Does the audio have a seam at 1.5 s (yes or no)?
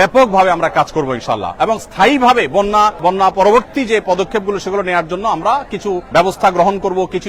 no